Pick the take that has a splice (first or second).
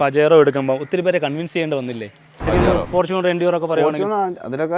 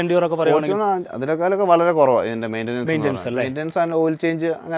first